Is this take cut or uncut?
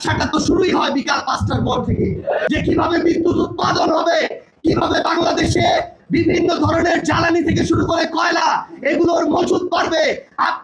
cut